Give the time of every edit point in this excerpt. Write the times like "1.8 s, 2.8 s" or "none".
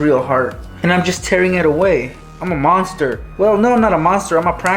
3.2 s